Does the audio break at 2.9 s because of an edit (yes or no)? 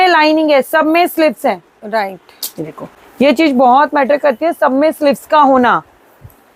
no